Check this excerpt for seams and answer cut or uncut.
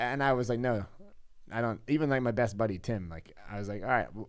uncut